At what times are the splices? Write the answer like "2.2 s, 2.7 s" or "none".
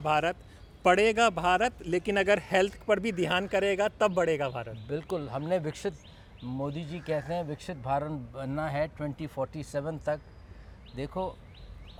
none

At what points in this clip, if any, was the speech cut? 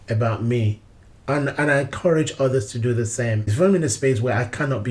3.4 s

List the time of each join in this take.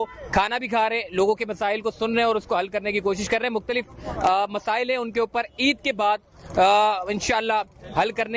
none

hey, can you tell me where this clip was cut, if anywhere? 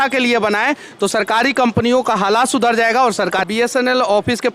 3.4 s

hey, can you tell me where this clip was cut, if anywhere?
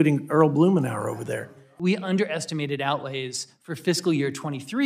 1.6 s

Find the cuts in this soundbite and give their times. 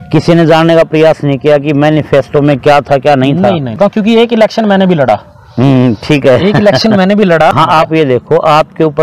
3.8 s, 7.5 s

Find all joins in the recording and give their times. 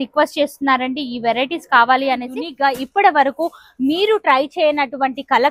2.4 s

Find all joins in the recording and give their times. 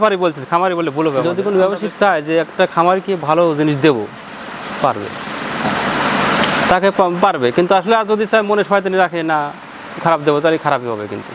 1.3 s

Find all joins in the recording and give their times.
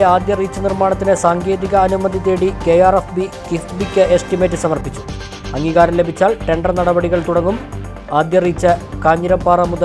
none

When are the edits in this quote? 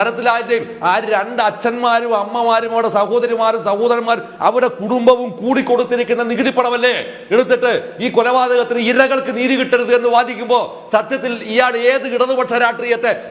none

